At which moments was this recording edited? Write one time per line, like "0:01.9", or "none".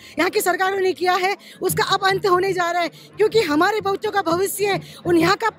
none